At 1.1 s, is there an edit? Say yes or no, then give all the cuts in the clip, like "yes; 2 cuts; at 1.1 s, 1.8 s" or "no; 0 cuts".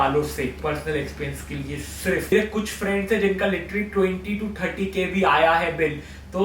no; 1 cut; at 2.3 s